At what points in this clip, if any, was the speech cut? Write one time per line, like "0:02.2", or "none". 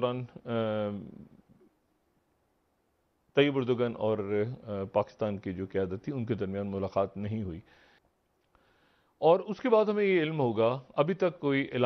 0:07.8